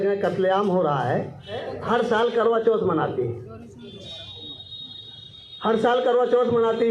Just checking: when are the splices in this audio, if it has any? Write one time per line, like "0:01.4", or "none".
0:01.7